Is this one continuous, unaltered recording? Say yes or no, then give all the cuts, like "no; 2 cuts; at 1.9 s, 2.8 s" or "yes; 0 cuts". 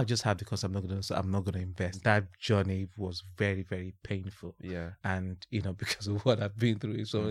no; 1 cut; at 2.0 s